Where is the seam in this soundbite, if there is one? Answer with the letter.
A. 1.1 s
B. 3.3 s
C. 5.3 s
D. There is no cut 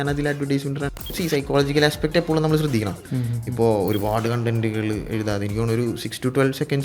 A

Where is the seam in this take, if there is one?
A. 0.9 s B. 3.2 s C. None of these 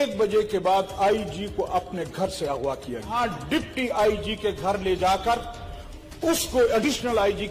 B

